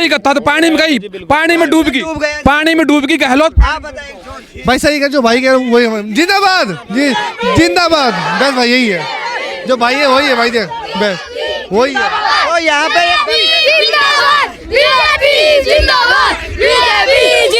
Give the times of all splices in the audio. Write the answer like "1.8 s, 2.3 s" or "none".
none